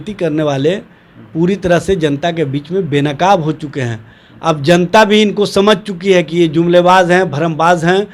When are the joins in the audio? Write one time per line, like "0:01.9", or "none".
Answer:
none

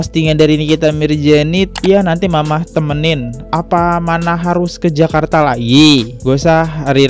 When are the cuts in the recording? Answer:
0:01.7

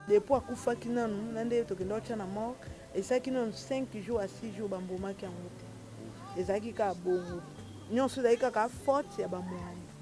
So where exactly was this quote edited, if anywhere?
none

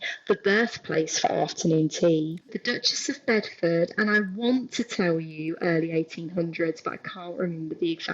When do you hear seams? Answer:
0:02.5

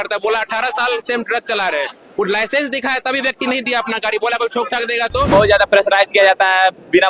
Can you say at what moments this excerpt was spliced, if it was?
0:05.3

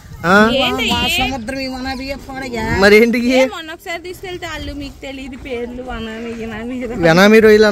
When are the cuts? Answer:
none

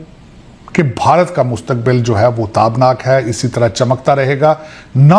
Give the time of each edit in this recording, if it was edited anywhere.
none

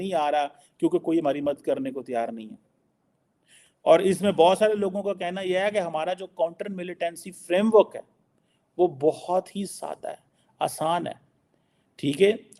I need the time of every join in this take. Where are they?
none

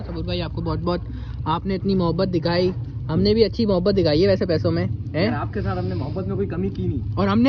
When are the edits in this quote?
none

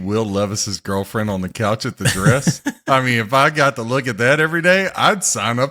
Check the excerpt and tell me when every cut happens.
none

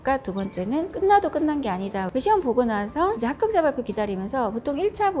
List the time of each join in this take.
0:02.1

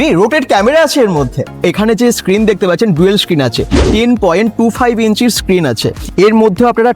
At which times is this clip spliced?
0:01.6
0:06.0

